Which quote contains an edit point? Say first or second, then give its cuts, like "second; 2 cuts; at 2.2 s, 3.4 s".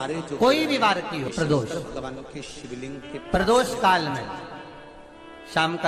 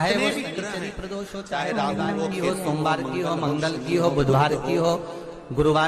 first; 1 cut; at 1.3 s